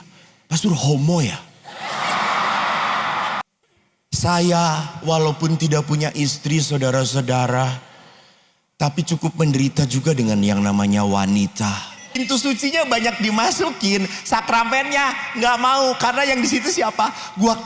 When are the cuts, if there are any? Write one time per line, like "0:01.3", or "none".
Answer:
0:03.4
0:12.2

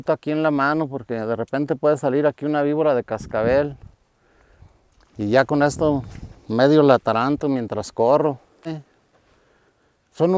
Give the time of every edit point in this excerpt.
0:08.7

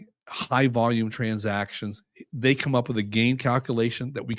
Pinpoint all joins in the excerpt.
none

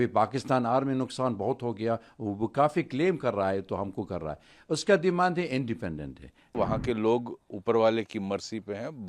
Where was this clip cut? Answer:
0:06.5

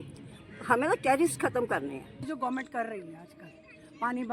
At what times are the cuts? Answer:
0:02.3

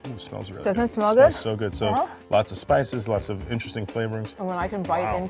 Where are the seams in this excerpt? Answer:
0:04.3

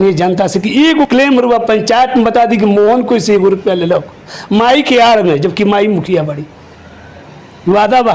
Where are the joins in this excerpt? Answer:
0:01.1

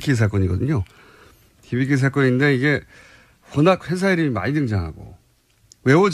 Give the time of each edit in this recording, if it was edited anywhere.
0:01.3

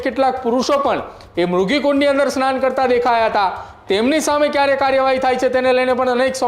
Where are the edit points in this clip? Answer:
none

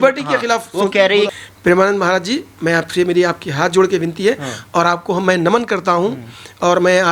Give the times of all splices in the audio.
0:01.3

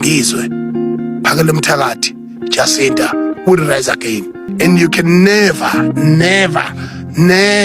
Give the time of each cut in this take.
0:04.4

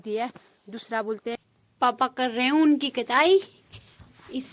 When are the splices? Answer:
0:01.4

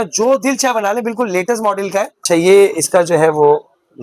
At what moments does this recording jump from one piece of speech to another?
0:02.2

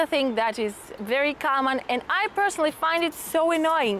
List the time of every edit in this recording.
none

